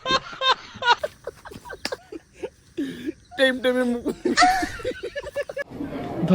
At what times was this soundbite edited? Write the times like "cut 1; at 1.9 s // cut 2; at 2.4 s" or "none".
cut 1; at 2.0 s